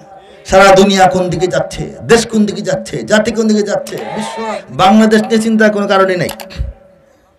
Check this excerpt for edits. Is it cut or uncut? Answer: cut